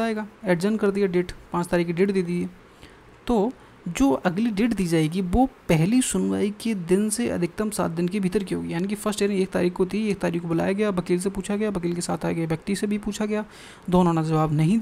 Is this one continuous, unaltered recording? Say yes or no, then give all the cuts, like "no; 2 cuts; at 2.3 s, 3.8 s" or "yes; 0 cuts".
yes; 0 cuts